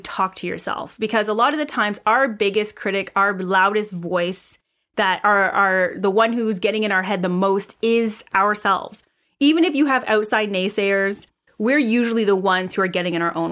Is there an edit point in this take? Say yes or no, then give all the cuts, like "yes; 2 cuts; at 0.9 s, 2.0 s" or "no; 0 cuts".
yes; 1 cut; at 11.4 s